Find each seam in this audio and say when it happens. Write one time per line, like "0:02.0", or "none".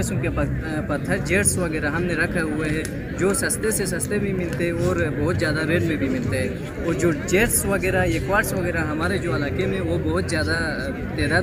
none